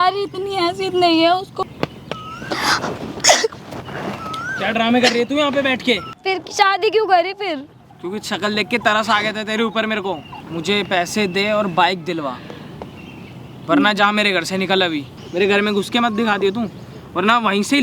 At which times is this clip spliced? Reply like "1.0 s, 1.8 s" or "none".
1.5 s, 6.1 s, 10.3 s, 15.2 s